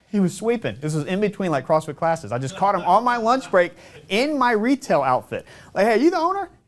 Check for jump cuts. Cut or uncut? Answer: uncut